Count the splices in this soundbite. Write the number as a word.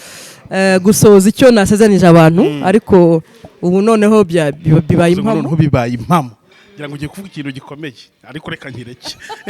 one